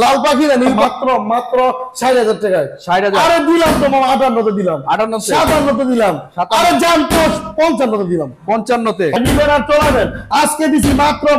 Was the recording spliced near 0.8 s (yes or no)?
yes